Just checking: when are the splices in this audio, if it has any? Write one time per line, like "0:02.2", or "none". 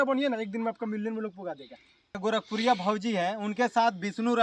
0:02.2